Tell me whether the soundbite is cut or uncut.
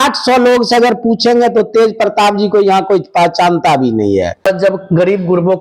uncut